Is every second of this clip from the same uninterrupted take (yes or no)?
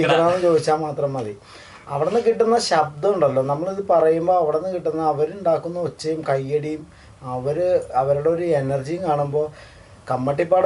yes